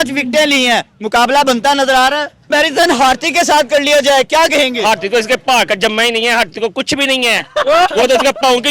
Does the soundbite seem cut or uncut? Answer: cut